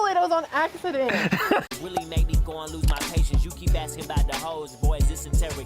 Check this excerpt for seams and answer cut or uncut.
cut